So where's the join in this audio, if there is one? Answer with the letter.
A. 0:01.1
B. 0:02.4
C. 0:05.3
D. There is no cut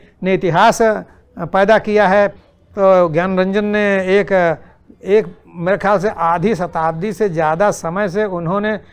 B